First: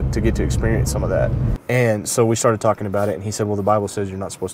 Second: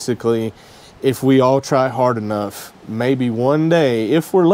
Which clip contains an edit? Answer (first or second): first